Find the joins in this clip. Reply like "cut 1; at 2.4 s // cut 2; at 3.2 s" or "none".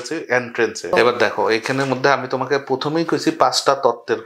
cut 1; at 0.9 s

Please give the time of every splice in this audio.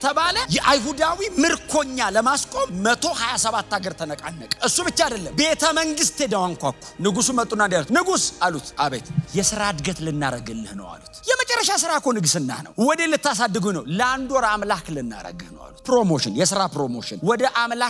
none

